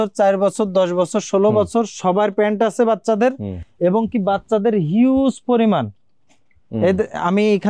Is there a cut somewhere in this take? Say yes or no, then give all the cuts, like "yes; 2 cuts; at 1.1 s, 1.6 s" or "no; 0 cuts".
no; 0 cuts